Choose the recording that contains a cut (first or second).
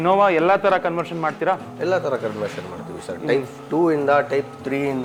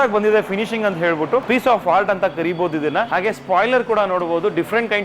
second